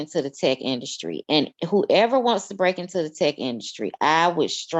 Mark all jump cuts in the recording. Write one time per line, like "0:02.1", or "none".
none